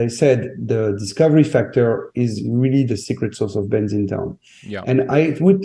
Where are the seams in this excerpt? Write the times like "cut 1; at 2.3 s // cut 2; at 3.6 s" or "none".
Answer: none